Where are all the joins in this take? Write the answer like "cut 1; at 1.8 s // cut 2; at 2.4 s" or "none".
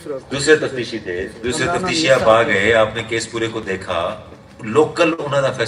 none